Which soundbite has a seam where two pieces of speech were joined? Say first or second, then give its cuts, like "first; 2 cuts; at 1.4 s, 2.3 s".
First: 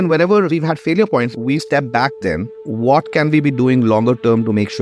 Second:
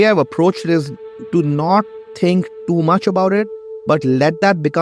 first; 1 cut; at 2.6 s